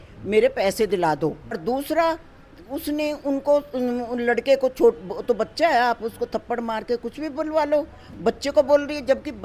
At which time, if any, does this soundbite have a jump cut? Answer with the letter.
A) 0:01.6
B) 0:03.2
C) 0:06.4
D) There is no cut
A